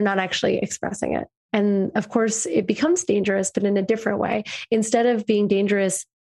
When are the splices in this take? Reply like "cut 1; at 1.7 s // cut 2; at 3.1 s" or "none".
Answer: cut 1; at 1.4 s